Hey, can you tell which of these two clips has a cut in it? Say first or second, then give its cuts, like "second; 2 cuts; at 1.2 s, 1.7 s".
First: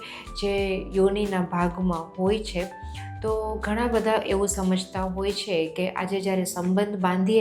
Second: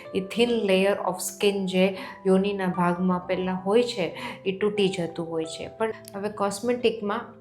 second; 1 cut; at 6.0 s